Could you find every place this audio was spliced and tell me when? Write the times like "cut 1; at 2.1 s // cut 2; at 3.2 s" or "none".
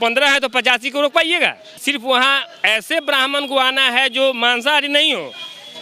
cut 1; at 1.8 s